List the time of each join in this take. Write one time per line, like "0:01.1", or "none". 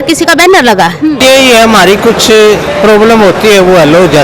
0:01.2